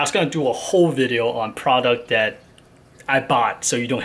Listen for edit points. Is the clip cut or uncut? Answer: uncut